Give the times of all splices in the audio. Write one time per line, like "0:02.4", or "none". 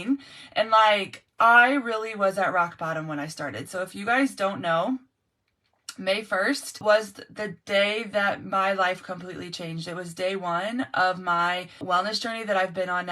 0:06.8
0:11.8